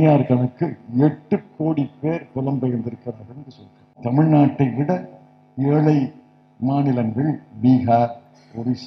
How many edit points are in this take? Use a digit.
1